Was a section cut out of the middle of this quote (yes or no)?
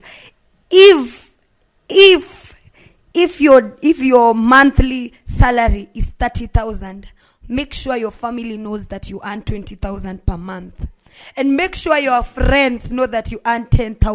no